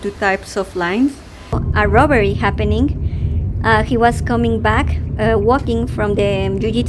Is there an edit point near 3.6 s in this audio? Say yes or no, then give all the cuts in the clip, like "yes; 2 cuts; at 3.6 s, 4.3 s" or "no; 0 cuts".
no; 1 cut; at 1.6 s